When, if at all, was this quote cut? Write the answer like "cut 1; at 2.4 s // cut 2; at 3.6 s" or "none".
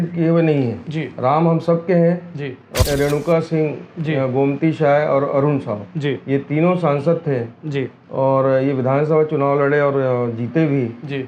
cut 1; at 2.8 s